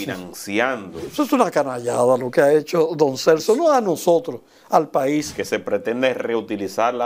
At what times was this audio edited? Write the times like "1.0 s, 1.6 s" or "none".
1.1 s, 5.4 s